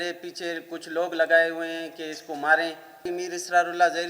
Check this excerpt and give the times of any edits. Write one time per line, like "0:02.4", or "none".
0:03.0